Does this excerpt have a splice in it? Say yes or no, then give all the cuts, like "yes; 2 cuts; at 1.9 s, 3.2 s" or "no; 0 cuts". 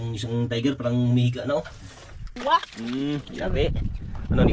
yes; 1 cut; at 2.4 s